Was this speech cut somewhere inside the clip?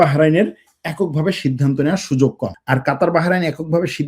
yes; 1 cut; at 2.5 s

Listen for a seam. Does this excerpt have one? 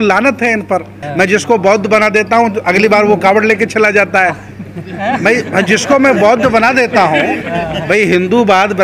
yes; 1 cut; at 1.0 s

